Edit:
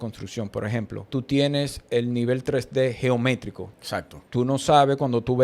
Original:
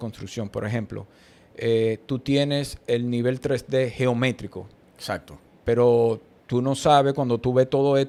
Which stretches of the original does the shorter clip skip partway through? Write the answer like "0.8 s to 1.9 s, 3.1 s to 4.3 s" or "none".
1.1 s to 2.0 s, 5.1 s to 6.3 s